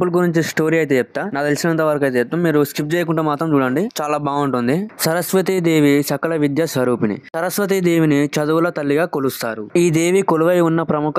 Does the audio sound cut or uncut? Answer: uncut